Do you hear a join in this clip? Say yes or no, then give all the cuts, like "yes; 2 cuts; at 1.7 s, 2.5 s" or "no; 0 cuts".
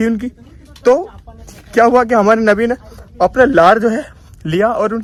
no; 0 cuts